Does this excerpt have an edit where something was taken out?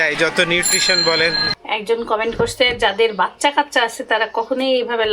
yes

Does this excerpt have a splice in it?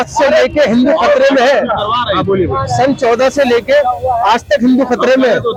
no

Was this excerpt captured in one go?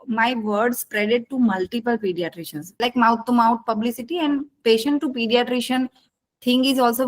no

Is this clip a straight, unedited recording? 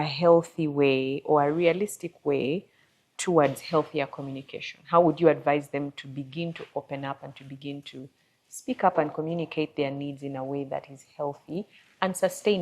yes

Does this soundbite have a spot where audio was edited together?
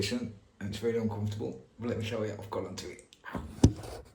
no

